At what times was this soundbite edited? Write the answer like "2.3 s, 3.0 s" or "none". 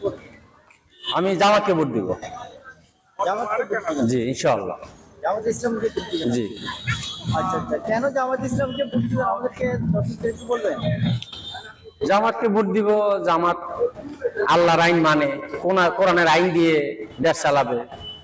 none